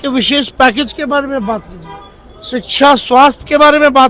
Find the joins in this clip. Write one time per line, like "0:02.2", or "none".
none